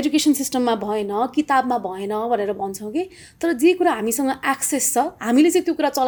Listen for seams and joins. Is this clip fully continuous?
yes; 0 cuts

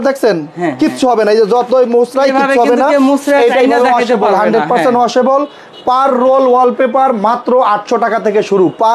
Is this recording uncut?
yes; 0 cuts

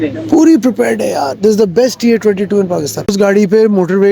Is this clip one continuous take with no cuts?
no; 1 cut; at 3.1 s

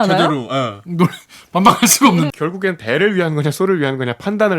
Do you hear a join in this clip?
yes; 1 cut; at 2.3 s

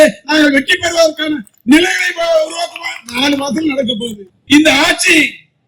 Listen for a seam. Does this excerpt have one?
yes; 1 cut; at 4.3 s

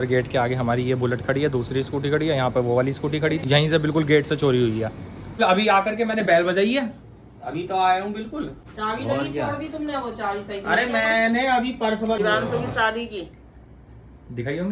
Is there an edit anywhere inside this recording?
yes; 4 cuts; at 3.4 s, 5.4 s, 8.7 s, 12.2 s

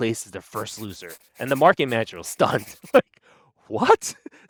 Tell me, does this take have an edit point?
no; 0 cuts

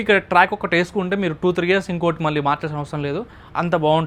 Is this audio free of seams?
yes; 0 cuts

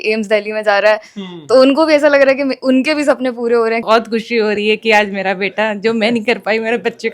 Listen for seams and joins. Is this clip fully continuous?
no; 1 cut; at 3.8 s

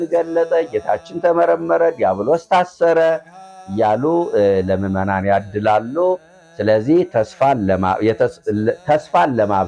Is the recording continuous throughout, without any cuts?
yes; 0 cuts

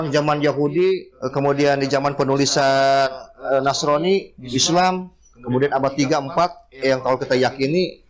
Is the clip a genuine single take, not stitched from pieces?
no; 1 cut; at 1.2 s

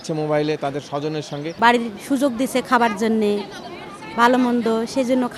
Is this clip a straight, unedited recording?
no; 1 cut; at 1.4 s

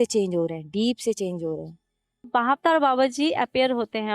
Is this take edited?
yes; 1 cut; at 2.2 s

